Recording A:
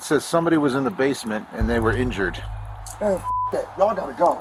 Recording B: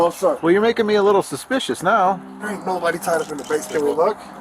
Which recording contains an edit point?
B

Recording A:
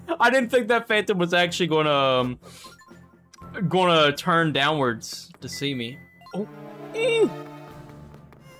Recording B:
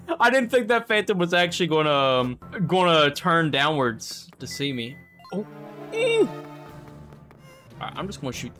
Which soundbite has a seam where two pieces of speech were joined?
B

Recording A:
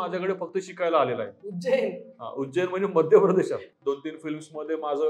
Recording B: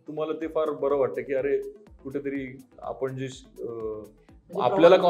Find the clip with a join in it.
A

